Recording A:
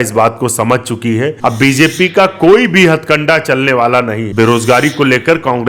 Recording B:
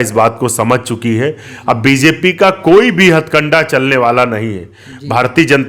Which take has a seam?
A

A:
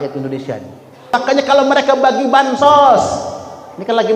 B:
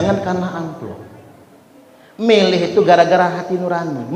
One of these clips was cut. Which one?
A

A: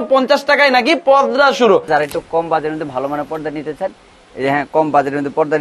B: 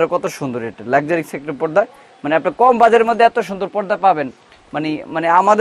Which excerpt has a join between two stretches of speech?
A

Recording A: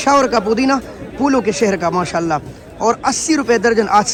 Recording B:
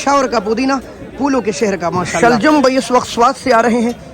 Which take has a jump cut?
B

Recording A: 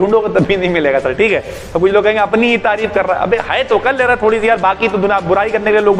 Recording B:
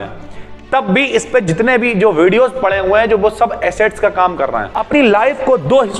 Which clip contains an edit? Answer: B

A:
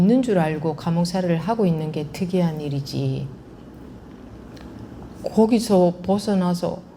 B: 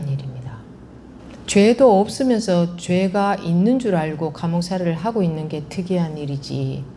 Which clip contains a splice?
B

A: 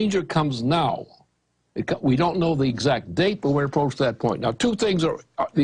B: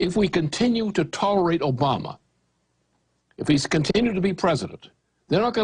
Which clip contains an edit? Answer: A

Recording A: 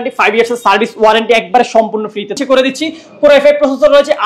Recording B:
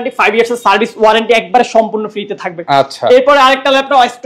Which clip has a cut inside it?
A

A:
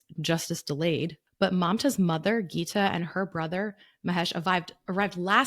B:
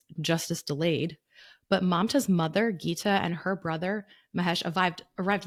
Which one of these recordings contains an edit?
A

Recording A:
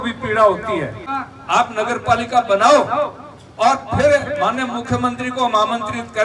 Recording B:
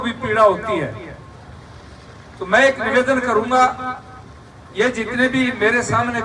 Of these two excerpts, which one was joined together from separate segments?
A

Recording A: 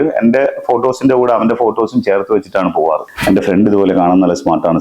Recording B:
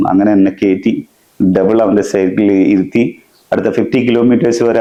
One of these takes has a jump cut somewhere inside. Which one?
A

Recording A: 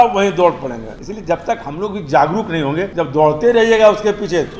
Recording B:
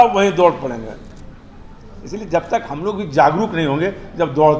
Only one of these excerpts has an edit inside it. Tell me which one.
A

